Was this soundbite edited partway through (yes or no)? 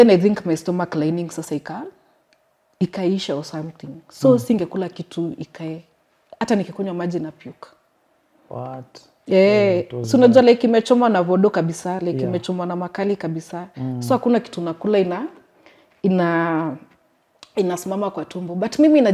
no